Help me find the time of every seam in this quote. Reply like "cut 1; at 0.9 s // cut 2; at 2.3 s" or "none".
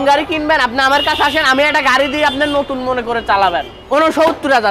cut 1; at 3.7 s